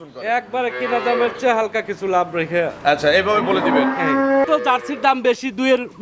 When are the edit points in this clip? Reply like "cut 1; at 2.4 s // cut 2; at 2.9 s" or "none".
cut 1; at 4.4 s